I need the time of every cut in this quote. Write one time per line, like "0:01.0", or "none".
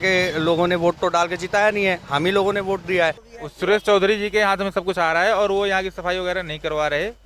0:03.3